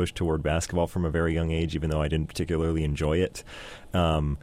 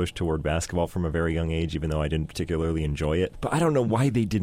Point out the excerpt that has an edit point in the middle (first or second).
second